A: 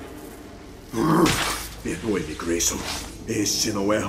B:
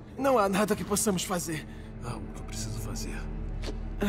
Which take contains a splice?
B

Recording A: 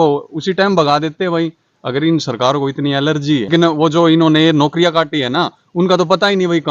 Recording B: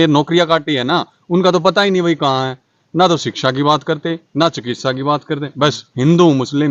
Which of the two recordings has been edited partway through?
A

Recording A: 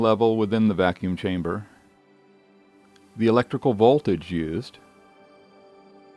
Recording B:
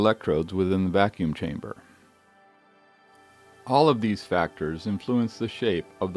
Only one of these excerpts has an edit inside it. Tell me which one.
A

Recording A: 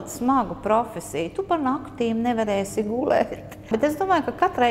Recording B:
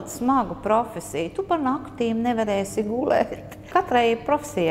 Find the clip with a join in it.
B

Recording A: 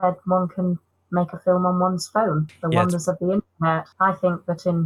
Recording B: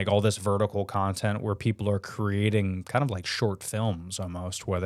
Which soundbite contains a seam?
A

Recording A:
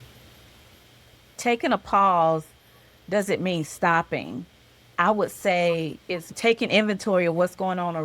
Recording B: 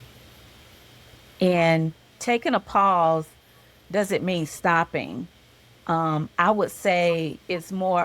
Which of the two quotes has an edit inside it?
A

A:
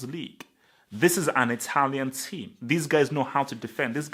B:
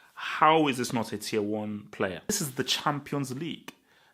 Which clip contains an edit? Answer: B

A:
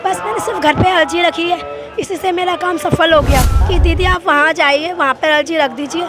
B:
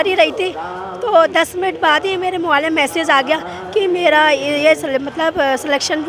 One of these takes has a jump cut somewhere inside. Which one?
A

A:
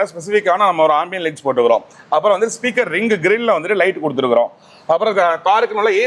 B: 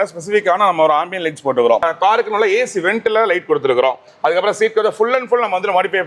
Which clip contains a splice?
B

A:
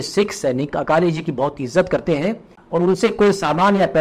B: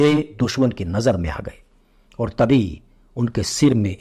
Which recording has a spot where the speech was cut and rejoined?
A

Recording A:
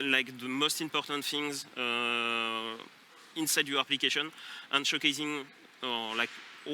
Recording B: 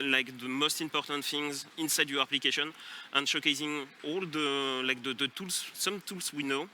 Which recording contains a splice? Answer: B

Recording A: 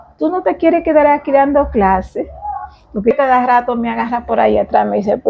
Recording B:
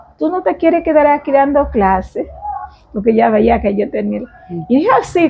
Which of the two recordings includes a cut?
A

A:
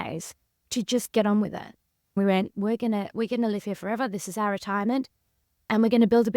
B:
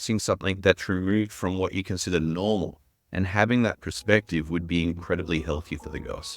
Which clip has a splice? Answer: A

